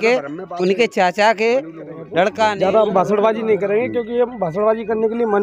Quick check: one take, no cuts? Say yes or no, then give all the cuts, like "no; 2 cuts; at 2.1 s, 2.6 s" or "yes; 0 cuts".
no; 1 cut; at 2.6 s